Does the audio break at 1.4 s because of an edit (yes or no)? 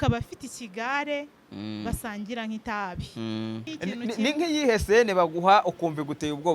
no